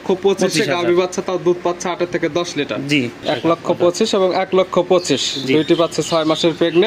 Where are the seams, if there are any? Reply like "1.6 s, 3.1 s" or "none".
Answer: 3.2 s